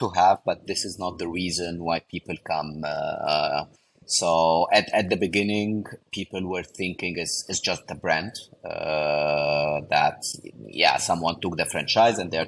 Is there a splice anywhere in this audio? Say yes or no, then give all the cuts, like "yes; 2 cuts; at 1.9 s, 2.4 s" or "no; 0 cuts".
no; 0 cuts